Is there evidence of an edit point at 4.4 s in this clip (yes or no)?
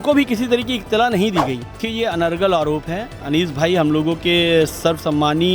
no